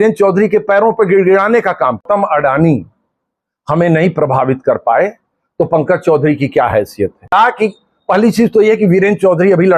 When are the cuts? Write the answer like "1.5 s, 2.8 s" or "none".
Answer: 2.0 s, 7.3 s